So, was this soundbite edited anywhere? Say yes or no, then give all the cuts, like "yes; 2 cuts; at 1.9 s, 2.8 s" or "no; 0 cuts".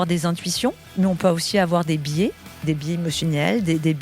yes; 2 cuts; at 0.8 s, 2.6 s